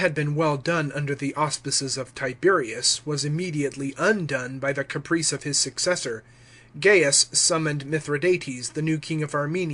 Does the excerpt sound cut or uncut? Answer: uncut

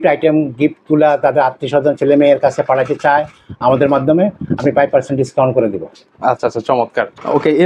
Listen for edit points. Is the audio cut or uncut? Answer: uncut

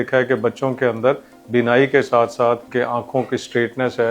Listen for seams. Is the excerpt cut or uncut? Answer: cut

